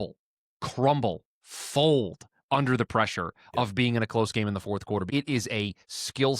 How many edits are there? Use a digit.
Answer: 1